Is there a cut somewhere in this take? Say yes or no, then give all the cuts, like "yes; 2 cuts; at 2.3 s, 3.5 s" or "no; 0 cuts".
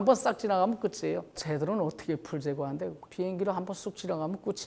yes; 1 cut; at 1.3 s